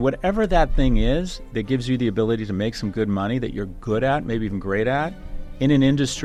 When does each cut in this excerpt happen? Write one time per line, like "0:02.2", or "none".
none